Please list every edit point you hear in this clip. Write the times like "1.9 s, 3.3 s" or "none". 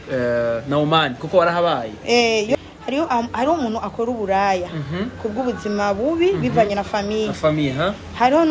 2.5 s